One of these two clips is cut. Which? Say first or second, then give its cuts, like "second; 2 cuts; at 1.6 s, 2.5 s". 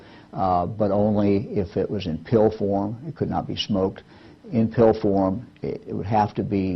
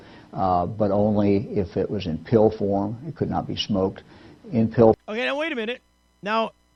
first; 1 cut; at 5.0 s